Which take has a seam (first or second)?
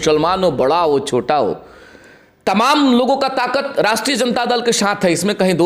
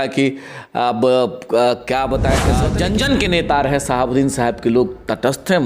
second